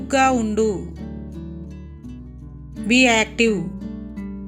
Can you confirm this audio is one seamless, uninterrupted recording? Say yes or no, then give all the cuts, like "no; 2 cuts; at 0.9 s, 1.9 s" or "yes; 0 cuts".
no; 3 cuts; at 0.9 s, 2.2 s, 3.7 s